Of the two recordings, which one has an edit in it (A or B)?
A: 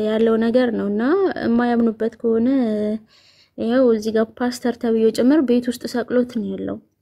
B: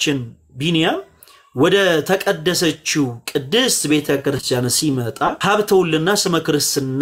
B